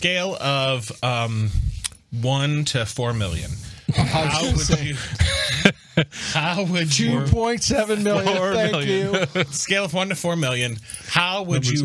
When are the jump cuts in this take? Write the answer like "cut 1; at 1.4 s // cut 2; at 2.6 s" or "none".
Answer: none